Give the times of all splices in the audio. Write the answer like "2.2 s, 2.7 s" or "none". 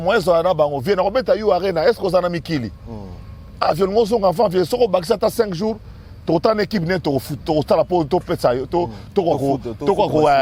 none